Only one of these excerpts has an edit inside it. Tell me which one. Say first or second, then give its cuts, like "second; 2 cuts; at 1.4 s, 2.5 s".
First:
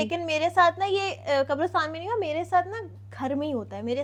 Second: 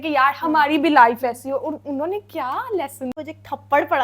second; 1 cut; at 3.1 s